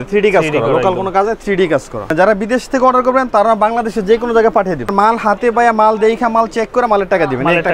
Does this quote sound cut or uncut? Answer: cut